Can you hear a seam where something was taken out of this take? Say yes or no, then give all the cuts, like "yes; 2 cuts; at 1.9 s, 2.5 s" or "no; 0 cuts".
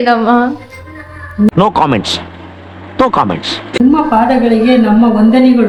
no; 0 cuts